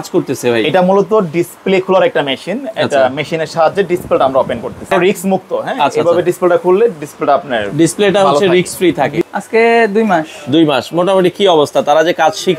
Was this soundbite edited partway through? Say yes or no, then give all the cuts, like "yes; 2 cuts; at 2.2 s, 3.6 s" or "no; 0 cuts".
yes; 2 cuts; at 4.9 s, 9.2 s